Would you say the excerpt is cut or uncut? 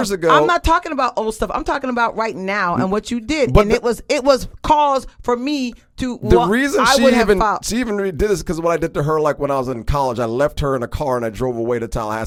uncut